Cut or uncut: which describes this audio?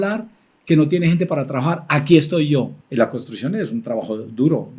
cut